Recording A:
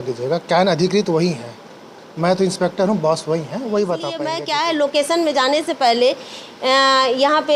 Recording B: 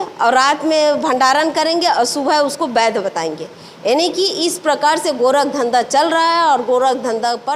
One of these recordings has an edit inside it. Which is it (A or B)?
A